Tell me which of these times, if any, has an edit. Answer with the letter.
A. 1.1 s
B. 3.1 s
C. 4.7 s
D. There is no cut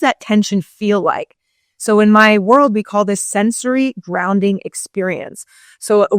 D